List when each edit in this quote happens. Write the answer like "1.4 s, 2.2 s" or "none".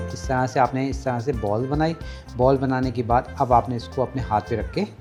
none